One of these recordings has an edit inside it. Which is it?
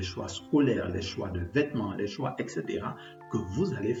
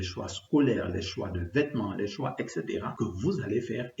second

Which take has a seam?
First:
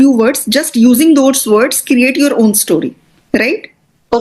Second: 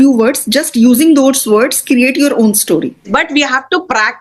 second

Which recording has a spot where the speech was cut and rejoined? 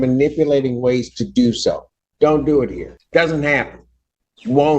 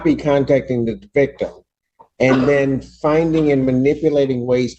first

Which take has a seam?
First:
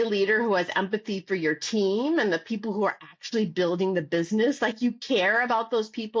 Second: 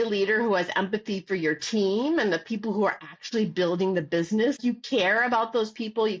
second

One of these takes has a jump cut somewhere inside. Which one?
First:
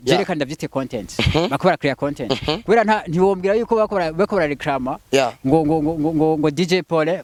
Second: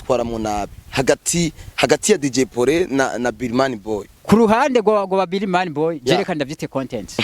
second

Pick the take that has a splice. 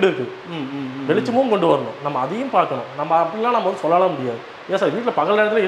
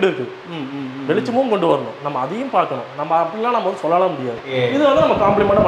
second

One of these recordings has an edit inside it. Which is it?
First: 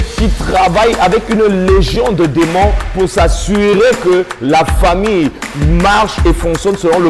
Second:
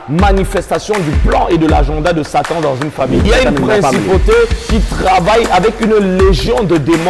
second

